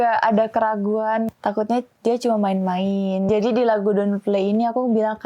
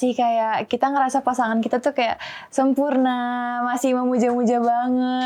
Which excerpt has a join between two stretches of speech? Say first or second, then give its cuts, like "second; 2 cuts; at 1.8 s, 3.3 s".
first; 2 cuts; at 1.3 s, 3.3 s